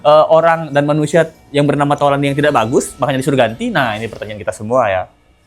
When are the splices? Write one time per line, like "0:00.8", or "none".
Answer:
none